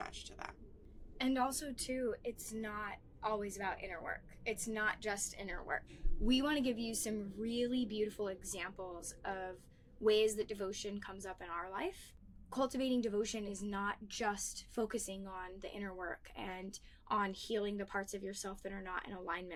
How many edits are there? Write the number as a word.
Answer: zero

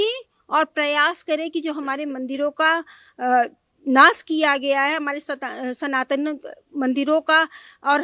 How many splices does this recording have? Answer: zero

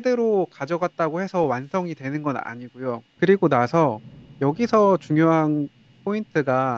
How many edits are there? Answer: one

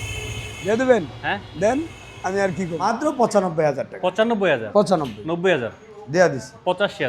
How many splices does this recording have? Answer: one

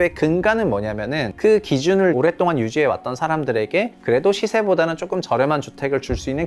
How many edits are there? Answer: zero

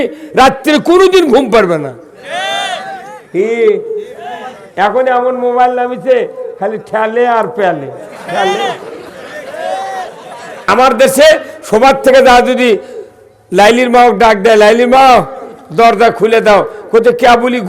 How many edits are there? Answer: one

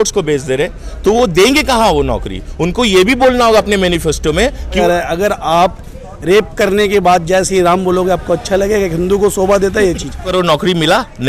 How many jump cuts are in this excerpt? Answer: two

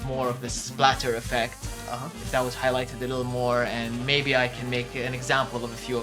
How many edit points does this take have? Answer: zero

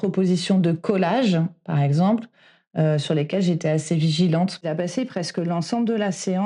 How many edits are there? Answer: one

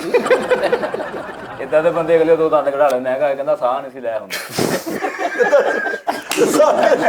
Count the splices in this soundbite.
one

